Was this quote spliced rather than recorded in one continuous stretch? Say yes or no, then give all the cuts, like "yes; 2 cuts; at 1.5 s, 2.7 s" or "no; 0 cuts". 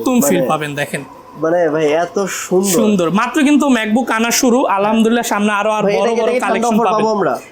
no; 0 cuts